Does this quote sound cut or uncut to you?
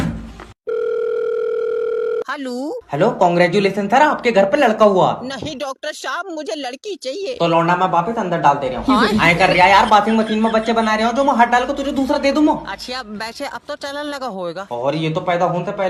uncut